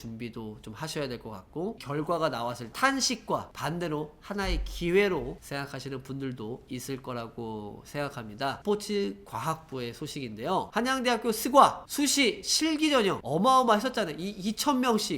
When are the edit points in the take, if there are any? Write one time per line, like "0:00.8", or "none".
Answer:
0:01.8
0:02.7
0:08.6

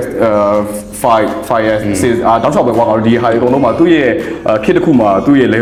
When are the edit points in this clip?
none

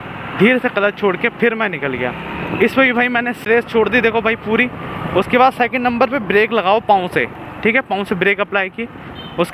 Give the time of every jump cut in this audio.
0:03.5

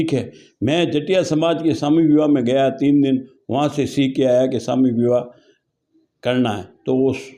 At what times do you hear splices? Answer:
none

